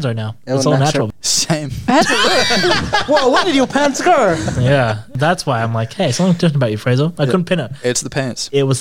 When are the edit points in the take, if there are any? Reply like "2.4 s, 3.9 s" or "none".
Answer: 1.1 s